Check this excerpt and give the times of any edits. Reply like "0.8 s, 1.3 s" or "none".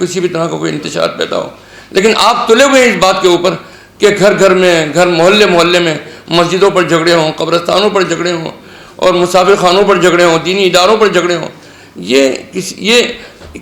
none